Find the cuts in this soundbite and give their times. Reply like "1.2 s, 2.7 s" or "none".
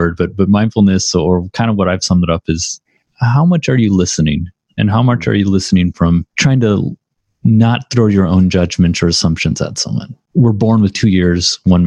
6.3 s, 10.2 s